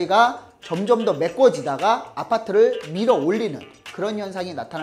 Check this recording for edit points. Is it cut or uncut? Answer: uncut